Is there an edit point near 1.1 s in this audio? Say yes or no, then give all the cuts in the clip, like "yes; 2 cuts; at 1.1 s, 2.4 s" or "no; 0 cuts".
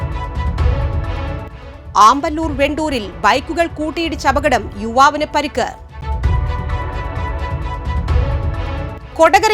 yes; 1 cut; at 1.1 s